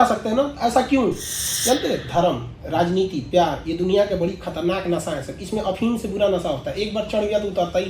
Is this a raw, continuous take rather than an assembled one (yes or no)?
no